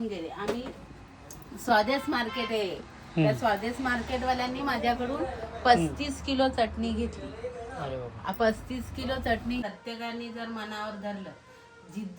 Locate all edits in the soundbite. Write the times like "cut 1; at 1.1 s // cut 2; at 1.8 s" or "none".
cut 1; at 9.6 s